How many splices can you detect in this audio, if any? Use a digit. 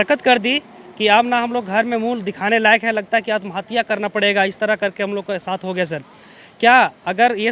0